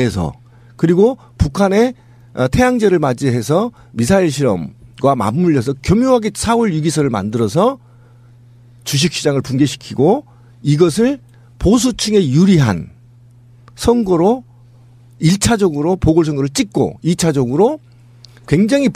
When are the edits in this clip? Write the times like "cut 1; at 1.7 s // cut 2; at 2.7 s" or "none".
cut 1; at 1.7 s